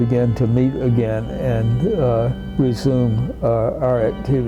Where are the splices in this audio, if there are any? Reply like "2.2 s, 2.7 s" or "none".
none